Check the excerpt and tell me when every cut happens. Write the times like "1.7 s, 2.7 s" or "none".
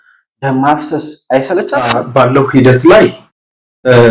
2.0 s